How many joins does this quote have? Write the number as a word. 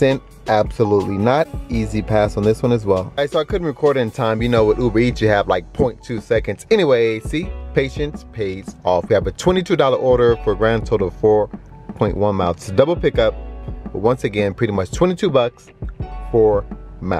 zero